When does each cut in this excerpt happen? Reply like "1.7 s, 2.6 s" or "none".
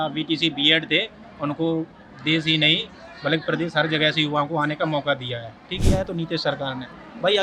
5.8 s